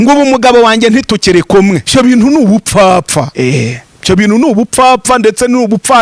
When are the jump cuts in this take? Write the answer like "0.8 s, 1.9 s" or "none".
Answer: 1.8 s, 3.3 s

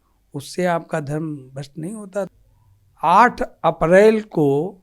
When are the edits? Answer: 2.3 s

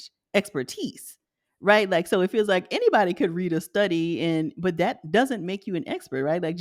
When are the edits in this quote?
none

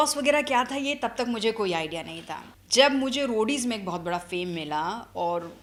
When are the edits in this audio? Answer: none

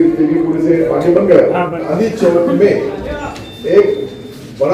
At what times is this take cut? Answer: 1.8 s

